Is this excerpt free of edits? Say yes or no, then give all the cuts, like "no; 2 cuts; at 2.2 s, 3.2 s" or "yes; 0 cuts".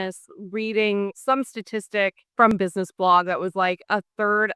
no; 1 cut; at 2.5 s